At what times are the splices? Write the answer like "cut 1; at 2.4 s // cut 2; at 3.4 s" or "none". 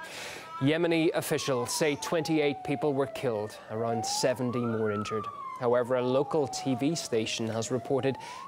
cut 1; at 1.7 s

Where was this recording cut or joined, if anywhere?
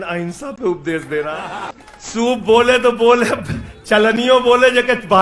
cut 1; at 1.7 s

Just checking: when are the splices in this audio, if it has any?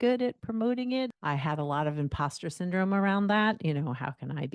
cut 1; at 1.1 s

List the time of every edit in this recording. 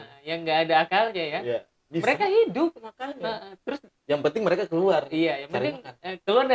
none

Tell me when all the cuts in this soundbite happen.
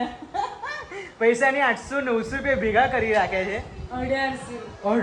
none

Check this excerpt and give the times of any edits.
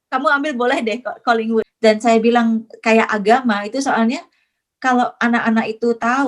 cut 1; at 1.7 s

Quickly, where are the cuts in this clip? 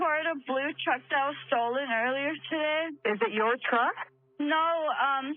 cut 1; at 2.9 s

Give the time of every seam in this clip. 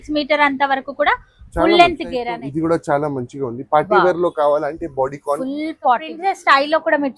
cut 1; at 2.3 s // cut 2; at 6.1 s

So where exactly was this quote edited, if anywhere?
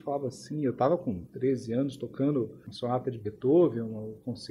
cut 1; at 1.2 s // cut 2; at 2.7 s

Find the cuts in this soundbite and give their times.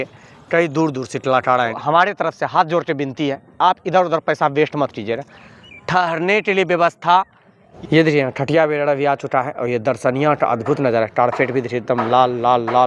cut 1; at 1.8 s // cut 2; at 7.7 s

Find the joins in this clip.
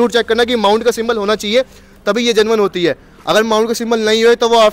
none

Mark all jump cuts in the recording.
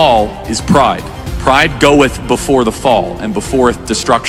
none

